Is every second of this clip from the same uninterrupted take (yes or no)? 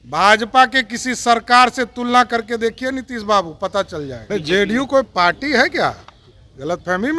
no